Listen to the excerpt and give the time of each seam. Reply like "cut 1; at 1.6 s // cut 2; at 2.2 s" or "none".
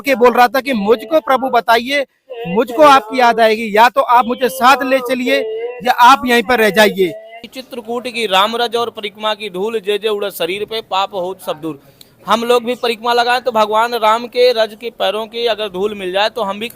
cut 1; at 7.3 s